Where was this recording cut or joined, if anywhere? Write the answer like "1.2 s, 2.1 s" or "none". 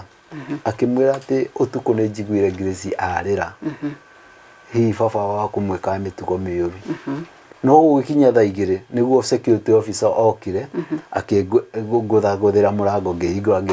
7.4 s